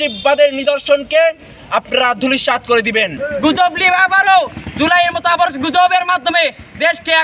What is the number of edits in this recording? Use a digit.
1